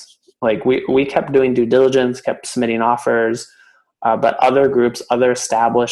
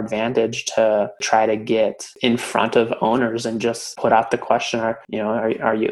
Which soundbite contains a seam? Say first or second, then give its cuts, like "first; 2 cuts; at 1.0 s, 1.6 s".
second; 4 cuts; at 1.2 s, 2.1 s, 3.9 s, 5.0 s